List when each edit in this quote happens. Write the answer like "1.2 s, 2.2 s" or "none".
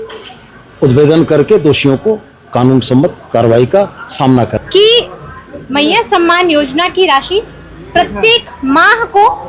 4.5 s